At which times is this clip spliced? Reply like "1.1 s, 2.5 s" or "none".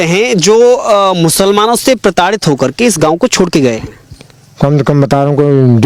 none